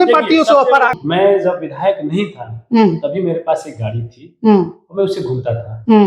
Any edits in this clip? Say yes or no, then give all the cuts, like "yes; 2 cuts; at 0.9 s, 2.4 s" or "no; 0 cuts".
yes; 1 cut; at 1.0 s